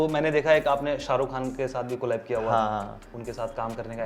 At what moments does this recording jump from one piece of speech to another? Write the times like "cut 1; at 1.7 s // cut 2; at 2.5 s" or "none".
cut 1; at 3.1 s